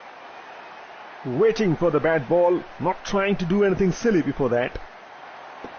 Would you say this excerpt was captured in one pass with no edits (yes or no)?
no